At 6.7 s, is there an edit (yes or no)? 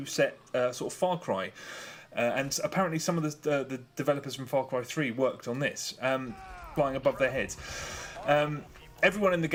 no